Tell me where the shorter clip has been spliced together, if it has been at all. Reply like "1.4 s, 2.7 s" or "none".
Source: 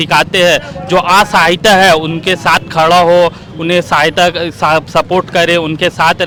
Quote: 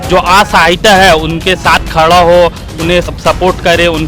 3.1 s